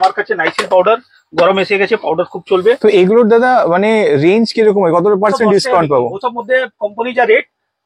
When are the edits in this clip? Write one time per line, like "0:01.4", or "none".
none